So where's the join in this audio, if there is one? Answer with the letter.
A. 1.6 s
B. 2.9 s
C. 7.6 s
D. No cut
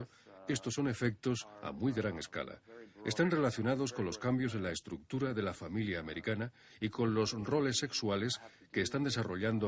B